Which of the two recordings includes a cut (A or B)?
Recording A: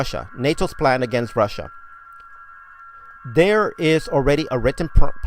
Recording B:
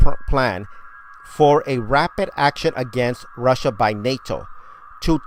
A